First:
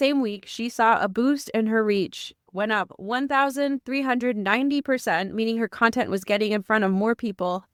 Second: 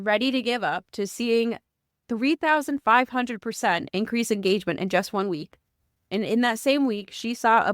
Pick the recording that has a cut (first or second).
second